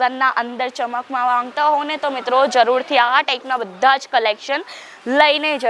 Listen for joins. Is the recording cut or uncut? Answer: uncut